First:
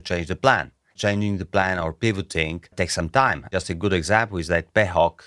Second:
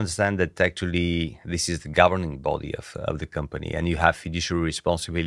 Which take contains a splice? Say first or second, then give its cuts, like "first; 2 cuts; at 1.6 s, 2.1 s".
first; 3 cuts; at 0.9 s, 2.6 s, 3.5 s